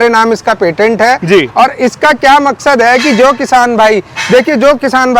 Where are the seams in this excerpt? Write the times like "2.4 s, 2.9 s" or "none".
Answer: none